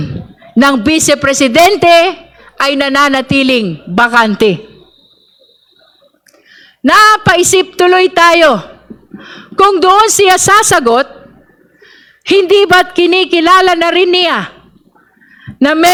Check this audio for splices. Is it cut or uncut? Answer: uncut